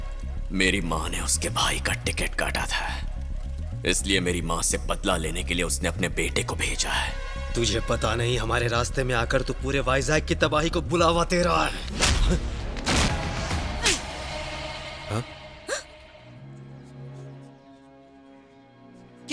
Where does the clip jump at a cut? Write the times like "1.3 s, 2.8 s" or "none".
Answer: 13.1 s, 16.3 s, 17.4 s

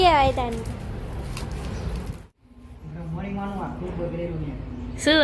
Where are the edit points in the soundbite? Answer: 2.2 s

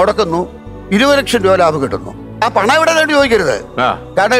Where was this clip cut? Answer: 2.4 s

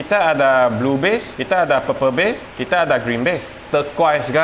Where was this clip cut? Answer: 1.3 s, 2.5 s, 3.5 s

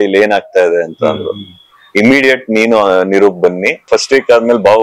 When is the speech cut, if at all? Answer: 3.9 s

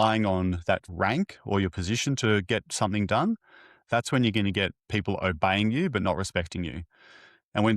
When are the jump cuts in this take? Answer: 0.9 s

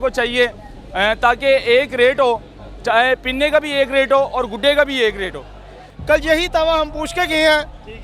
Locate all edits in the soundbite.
5.9 s

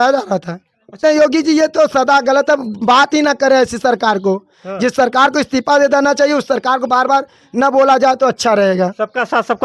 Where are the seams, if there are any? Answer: 1.0 s

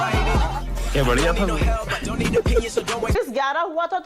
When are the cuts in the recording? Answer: 3.1 s

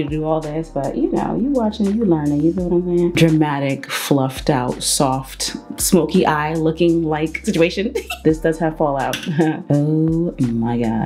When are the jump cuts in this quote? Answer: 3.1 s, 8.2 s, 9.7 s

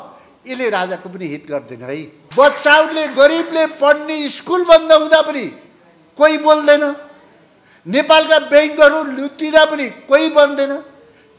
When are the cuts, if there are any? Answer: 2.2 s

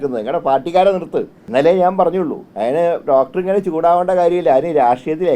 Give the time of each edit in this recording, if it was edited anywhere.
1.4 s, 2.4 s

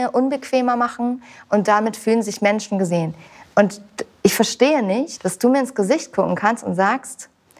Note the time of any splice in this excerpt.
5.2 s

